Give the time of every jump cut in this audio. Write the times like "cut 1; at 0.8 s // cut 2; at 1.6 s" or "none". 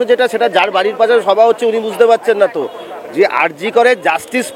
none